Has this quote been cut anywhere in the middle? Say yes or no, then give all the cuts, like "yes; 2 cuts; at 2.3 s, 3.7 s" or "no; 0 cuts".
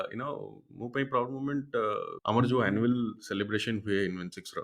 yes; 1 cut; at 2.1 s